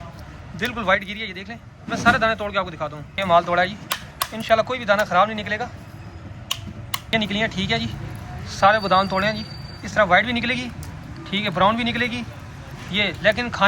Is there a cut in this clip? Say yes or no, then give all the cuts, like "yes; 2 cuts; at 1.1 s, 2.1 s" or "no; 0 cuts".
no; 0 cuts